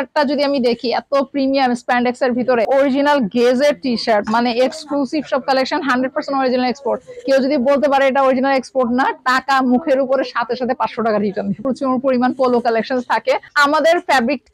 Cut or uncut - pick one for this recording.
cut